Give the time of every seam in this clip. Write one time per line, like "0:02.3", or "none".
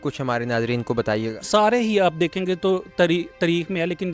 0:01.4